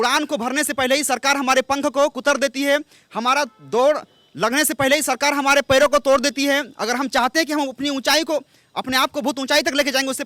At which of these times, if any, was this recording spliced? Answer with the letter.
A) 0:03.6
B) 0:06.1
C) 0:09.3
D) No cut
D